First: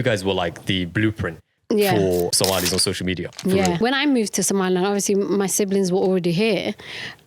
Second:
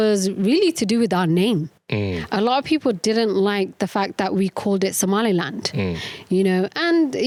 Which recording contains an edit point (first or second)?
first